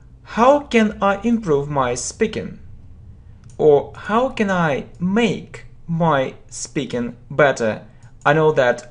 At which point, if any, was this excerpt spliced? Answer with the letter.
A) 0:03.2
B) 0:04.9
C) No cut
A